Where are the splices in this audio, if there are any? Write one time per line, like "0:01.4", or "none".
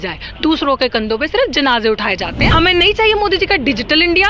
0:02.4